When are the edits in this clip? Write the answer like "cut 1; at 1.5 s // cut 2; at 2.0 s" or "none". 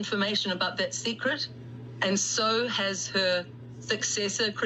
none